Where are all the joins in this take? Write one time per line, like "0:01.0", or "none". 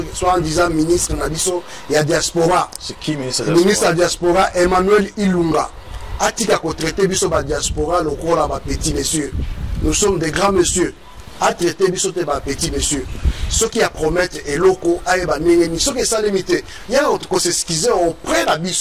none

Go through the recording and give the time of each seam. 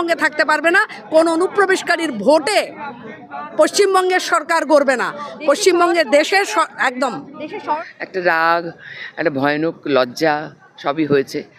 0:07.9

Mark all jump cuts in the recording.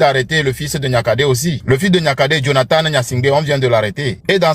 none

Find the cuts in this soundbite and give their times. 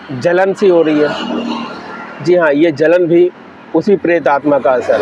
none

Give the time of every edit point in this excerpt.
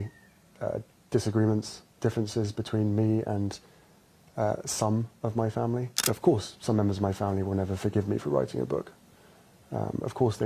0:05.9

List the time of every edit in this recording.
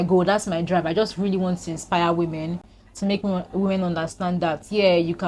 none

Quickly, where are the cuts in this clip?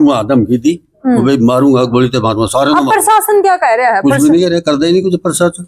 none

